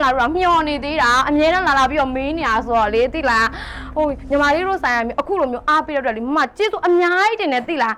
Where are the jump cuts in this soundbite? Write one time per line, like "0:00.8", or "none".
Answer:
none